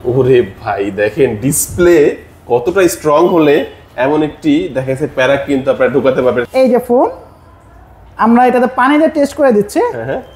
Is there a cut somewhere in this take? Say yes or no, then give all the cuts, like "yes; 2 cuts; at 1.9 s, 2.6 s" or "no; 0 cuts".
yes; 1 cut; at 6.5 s